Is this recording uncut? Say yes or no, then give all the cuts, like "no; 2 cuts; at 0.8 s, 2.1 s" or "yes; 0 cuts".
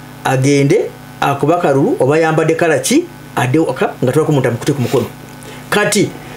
yes; 0 cuts